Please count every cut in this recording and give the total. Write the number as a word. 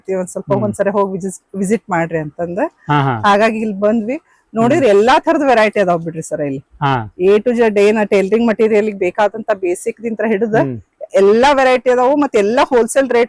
zero